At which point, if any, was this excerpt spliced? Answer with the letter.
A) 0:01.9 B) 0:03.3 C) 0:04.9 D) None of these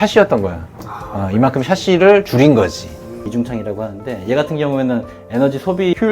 B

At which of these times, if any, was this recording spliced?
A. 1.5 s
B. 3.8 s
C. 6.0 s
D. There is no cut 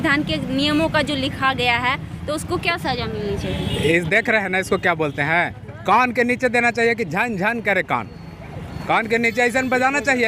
D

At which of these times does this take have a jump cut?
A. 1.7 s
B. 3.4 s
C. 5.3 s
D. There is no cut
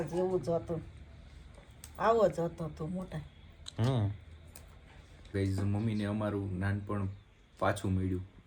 C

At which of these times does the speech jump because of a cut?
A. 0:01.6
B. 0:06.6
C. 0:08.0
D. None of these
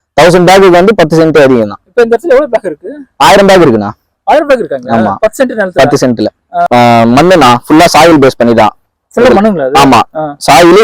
B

